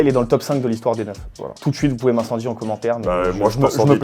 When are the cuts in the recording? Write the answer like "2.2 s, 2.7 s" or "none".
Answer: none